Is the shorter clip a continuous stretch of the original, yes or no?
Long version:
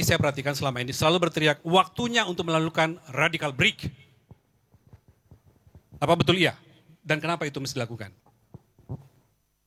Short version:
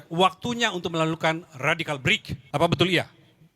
no